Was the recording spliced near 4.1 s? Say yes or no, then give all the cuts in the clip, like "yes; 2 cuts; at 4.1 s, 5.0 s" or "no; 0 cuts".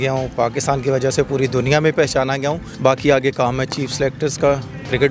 no; 1 cut; at 2.7 s